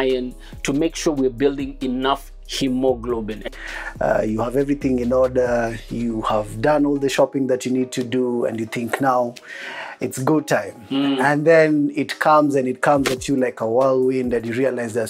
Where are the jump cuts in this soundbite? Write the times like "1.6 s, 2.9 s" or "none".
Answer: 3.5 s